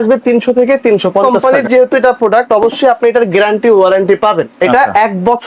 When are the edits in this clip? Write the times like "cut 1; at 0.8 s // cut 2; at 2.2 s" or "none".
cut 1; at 1.2 s